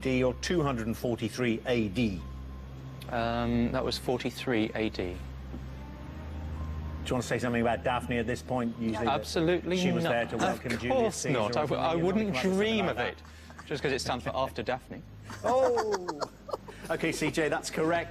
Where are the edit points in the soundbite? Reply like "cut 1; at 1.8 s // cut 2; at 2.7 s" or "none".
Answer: cut 1; at 6.6 s